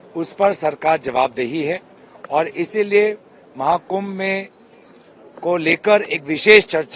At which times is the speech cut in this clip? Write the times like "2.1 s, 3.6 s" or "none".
none

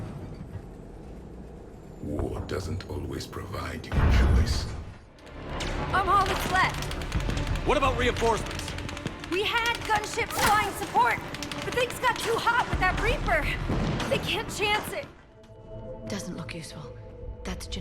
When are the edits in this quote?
5.4 s, 15.2 s

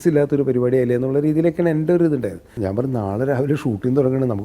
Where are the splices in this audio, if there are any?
2.5 s

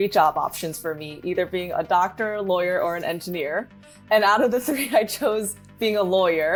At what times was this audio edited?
none

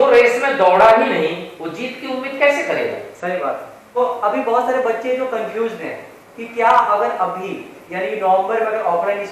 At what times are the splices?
4.0 s

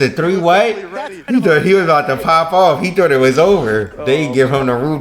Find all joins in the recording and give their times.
none

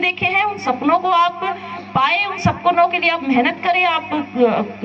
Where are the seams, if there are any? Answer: none

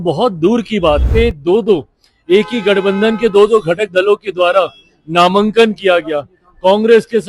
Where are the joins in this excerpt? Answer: 1.1 s

